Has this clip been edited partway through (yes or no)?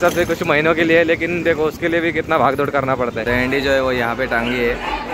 yes